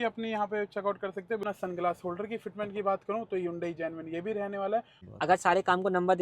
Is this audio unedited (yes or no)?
no